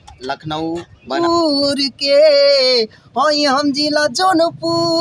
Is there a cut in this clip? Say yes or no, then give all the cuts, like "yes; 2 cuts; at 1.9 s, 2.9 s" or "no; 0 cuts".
yes; 1 cut; at 1.1 s